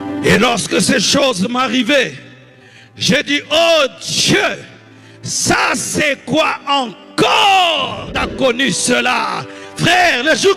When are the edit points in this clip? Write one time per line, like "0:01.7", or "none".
0:08.2